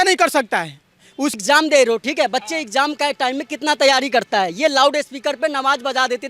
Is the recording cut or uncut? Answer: cut